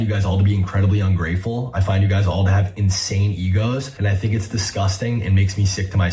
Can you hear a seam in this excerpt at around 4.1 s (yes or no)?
yes